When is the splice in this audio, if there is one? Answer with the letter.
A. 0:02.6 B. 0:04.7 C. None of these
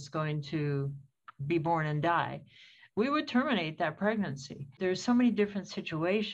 B